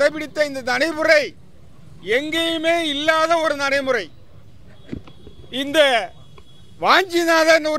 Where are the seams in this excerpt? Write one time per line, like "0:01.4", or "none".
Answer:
none